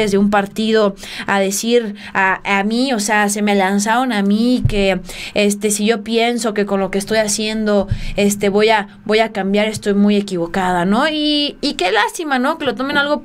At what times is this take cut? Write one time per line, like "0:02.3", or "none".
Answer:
none